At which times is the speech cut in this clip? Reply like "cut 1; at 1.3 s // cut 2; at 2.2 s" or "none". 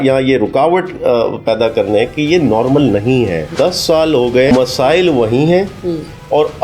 cut 1; at 3.5 s // cut 2; at 4.5 s